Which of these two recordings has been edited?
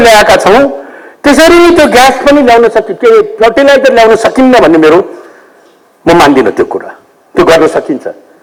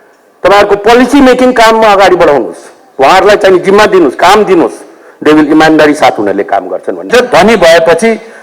second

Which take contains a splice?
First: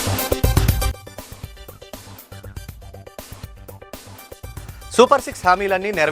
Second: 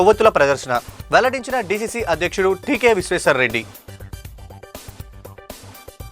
first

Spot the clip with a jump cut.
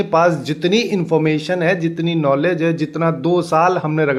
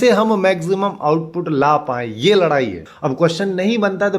second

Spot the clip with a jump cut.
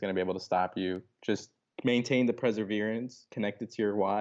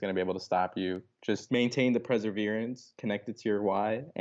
second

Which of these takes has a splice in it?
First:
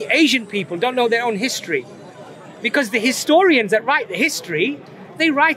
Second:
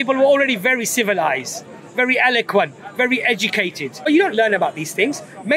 second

